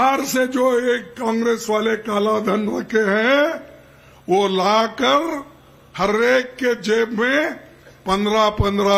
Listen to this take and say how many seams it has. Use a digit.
0